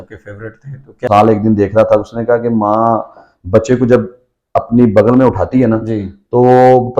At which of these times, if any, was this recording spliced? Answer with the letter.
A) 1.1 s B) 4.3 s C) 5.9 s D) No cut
A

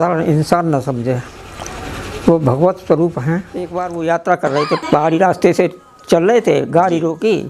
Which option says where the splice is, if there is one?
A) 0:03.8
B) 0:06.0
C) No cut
A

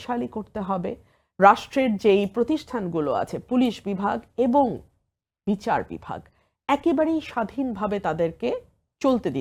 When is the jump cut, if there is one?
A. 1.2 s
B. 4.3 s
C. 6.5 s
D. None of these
D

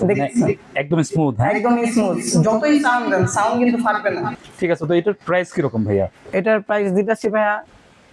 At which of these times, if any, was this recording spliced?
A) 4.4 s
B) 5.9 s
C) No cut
A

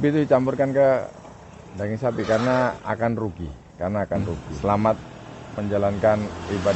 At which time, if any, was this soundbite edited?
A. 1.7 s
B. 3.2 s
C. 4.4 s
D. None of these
C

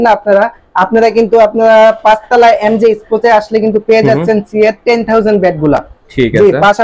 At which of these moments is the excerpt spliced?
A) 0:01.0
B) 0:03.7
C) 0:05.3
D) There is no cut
D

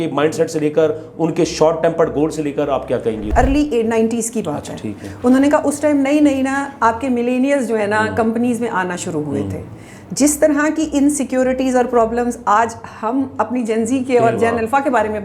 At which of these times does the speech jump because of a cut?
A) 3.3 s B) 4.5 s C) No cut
A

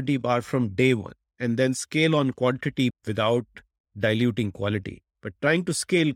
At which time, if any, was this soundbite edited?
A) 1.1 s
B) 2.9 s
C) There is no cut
B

